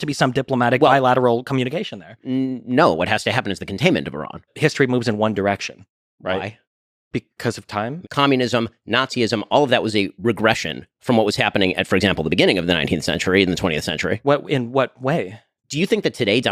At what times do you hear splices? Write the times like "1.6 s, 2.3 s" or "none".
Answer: 4.5 s, 8.0 s, 15.6 s